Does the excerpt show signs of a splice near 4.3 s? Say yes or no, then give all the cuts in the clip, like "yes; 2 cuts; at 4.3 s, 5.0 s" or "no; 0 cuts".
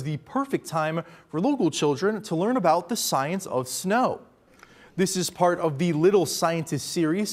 no; 0 cuts